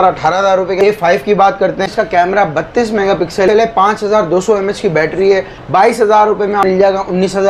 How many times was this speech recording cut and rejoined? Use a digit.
5